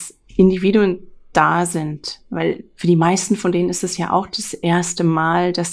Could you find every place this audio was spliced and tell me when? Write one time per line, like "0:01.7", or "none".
none